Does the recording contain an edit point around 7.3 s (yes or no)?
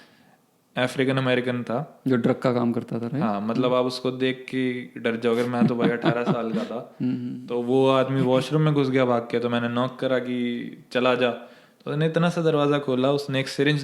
yes